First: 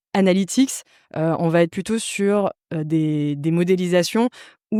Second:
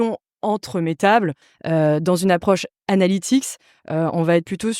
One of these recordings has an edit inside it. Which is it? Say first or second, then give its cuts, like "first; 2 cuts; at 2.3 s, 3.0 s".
second; 1 cut; at 1.5 s